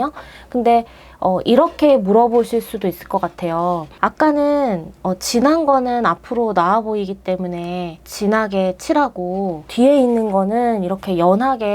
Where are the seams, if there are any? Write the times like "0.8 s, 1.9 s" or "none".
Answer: 3.9 s, 8.0 s, 9.6 s